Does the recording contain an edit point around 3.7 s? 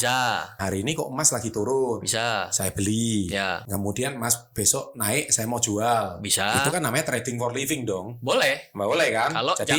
yes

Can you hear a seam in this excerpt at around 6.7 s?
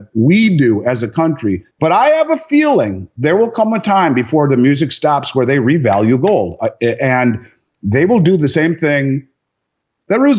no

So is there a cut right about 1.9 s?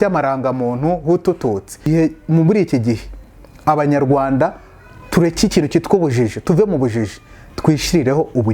yes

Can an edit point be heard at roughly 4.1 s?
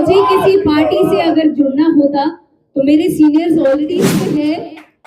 yes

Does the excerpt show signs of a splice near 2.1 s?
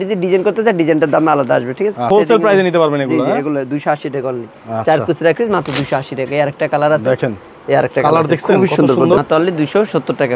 yes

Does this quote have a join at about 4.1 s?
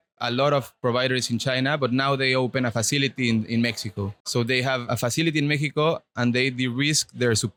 no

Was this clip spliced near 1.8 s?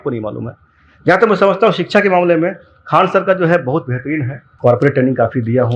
no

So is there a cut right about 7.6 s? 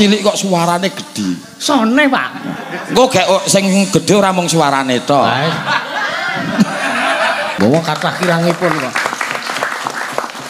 yes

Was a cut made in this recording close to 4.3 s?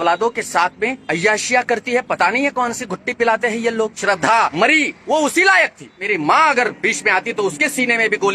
yes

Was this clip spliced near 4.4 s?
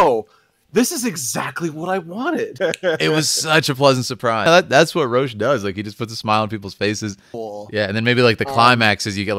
yes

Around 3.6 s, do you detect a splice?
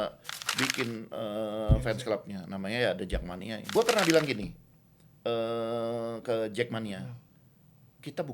yes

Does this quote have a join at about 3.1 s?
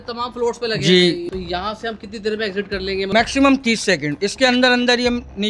yes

